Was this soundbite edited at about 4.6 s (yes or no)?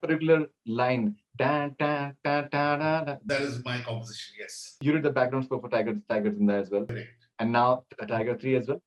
yes